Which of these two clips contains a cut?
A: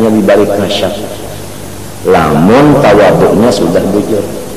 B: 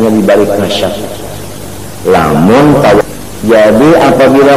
B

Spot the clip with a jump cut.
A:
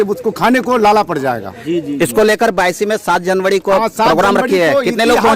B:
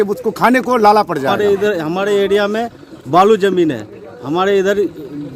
B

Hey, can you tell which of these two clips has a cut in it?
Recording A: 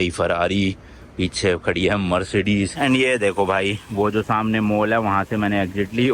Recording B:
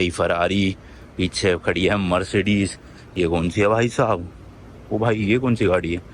A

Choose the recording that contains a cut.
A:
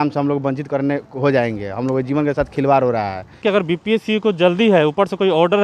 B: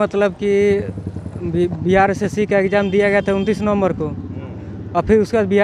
A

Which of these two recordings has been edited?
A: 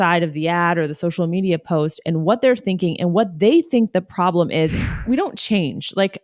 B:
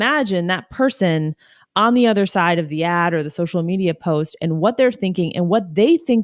A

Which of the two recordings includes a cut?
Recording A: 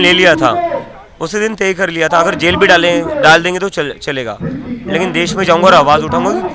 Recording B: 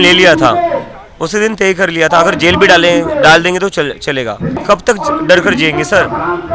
B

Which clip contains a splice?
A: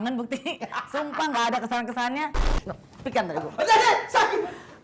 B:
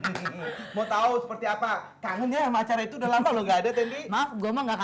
A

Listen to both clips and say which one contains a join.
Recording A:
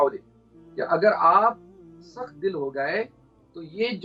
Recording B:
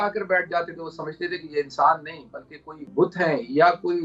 B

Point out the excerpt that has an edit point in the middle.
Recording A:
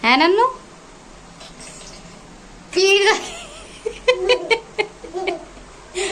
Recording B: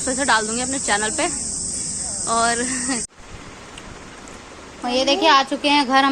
B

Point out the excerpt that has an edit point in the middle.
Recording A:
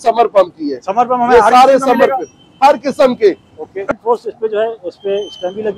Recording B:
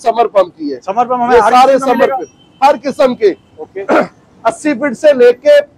A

